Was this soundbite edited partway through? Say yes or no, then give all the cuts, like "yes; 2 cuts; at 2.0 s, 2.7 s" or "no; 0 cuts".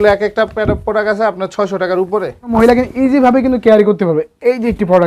yes; 1 cut; at 2.5 s